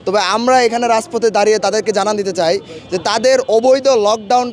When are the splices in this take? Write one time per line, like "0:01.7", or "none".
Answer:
none